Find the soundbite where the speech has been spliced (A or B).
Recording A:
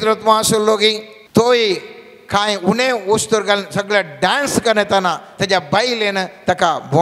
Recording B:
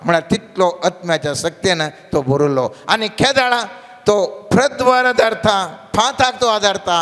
A